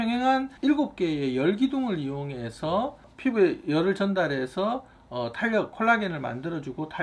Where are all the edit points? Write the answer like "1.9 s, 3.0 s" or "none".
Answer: none